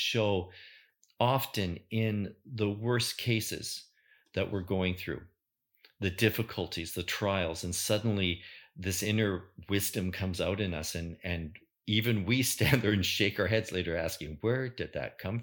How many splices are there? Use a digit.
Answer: 0